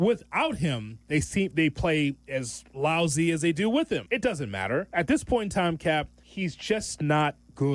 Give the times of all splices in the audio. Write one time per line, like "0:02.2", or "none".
0:04.3
0:06.2